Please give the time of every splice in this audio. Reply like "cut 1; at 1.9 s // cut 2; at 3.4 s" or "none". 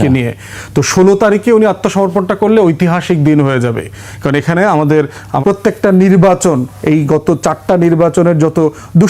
cut 1; at 5.3 s